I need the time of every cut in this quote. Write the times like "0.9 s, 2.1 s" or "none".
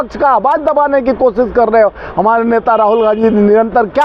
none